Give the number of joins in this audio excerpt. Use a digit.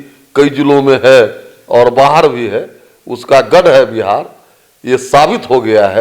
0